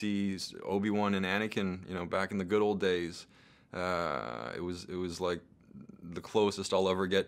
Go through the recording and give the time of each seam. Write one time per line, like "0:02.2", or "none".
none